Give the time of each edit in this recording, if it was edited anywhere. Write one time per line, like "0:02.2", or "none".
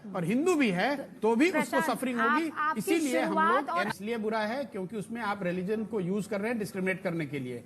0:03.9